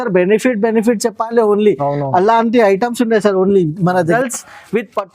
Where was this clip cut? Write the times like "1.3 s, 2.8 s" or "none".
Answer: 4.1 s

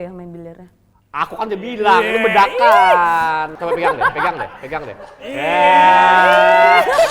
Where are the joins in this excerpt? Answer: 3.6 s

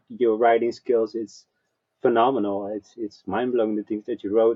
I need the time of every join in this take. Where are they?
none

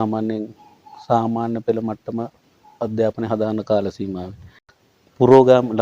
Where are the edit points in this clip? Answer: 4.7 s

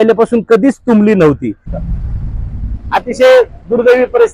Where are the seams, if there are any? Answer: 1.7 s

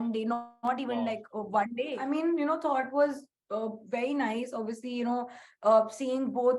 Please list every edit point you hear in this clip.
2.0 s

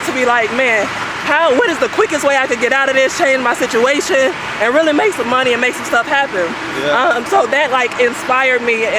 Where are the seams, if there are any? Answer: none

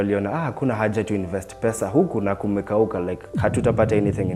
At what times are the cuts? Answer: none

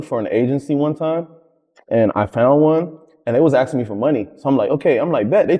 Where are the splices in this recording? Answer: none

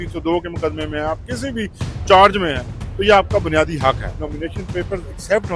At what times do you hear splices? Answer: 4.3 s

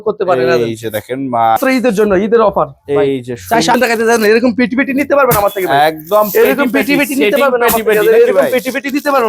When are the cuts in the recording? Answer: 1.6 s, 3.7 s

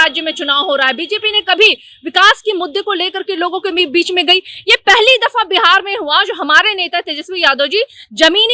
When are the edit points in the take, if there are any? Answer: none

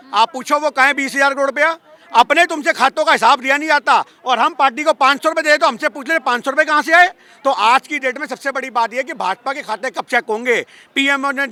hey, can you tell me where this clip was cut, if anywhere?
none

